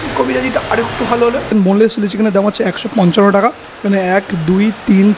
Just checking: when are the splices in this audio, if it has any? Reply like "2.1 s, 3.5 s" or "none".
1.5 s